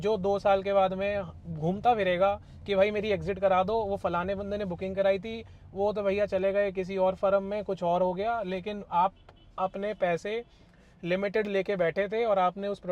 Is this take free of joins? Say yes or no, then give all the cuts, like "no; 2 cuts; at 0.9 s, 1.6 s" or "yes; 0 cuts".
yes; 0 cuts